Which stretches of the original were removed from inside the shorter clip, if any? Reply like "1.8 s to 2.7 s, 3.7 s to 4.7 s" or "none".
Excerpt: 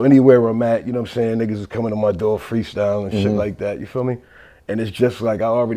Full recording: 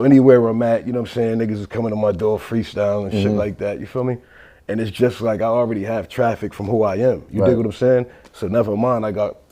none